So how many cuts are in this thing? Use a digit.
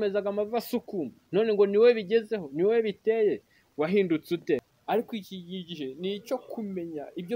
1